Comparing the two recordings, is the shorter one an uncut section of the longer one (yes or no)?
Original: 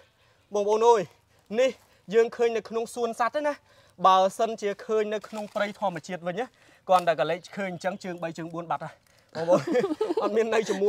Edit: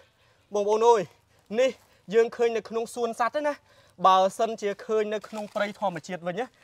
yes